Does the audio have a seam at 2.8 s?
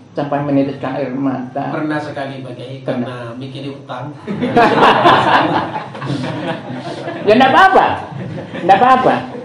no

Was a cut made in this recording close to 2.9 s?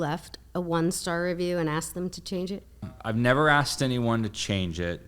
yes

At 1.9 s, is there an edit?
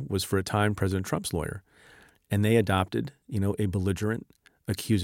no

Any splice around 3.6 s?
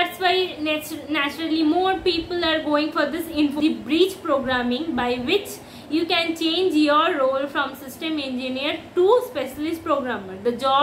yes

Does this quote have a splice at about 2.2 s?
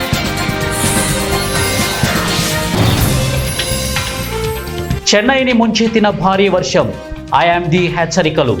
no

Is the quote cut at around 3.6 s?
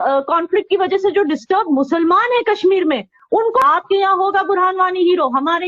yes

